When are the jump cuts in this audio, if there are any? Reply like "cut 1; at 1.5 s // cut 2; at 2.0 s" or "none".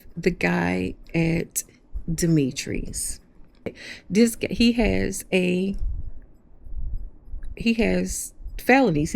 cut 1; at 3.9 s